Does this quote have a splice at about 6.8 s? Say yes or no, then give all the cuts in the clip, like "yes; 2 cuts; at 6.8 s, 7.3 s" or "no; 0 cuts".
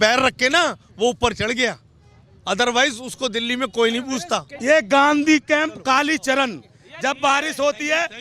no; 1 cut; at 4.5 s